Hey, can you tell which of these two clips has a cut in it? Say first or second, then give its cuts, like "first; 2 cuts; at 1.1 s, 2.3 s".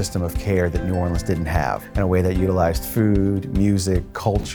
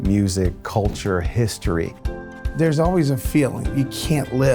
second; 1 cut; at 2.3 s